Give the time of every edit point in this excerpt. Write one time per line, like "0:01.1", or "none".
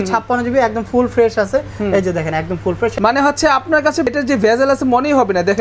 0:03.0
0:04.1